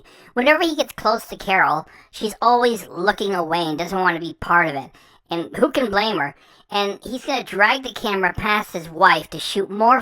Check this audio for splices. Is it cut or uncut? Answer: uncut